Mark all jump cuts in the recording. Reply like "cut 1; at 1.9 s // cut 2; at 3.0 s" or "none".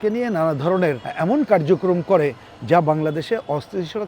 cut 1; at 1.1 s

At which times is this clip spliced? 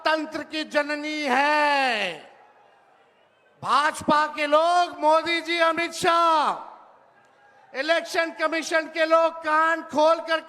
none

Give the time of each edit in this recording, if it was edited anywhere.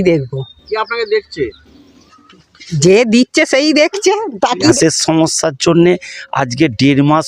cut 1; at 4.8 s

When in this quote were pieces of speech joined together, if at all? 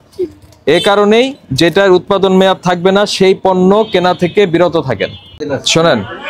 cut 1; at 5.3 s

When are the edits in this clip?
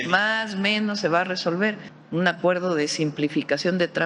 cut 1; at 1.9 s

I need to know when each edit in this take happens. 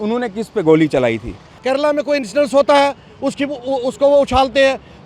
cut 1; at 1.5 s

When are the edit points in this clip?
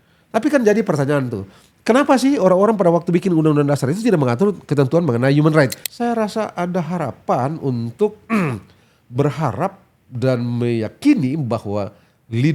cut 1; at 5.8 s

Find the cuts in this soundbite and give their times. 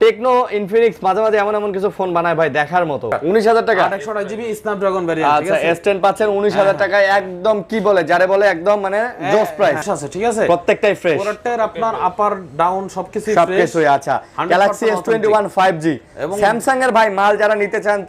cut 1; at 3.2 s // cut 2; at 9.8 s

